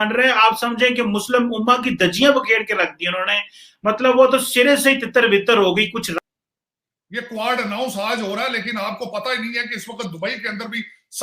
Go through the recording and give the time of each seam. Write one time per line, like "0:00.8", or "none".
0:06.2